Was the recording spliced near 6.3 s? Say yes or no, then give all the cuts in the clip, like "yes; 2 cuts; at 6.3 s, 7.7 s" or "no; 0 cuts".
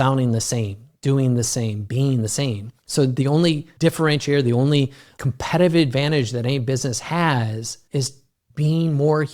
no; 4 cuts; at 2.7 s, 3.7 s, 5.1 s, 8.2 s